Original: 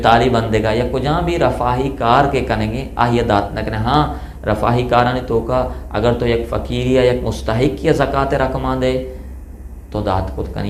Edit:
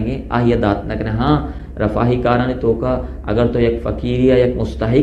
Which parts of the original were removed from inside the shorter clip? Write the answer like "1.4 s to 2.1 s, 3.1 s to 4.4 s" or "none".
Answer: none